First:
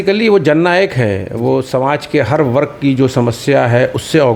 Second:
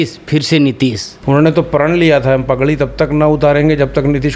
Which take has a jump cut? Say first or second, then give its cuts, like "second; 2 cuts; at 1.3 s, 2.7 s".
second; 1 cut; at 1.1 s